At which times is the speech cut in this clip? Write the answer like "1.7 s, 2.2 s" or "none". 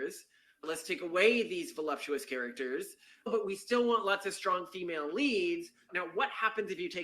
3.3 s, 5.9 s